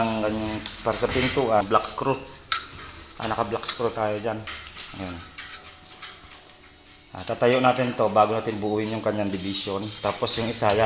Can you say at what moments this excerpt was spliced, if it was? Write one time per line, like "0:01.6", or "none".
0:01.6